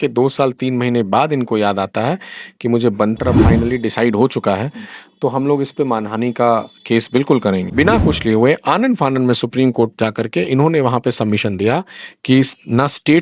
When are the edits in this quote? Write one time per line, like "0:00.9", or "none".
0:03.2
0:07.7